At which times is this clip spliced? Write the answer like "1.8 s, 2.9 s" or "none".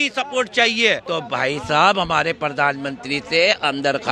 1.0 s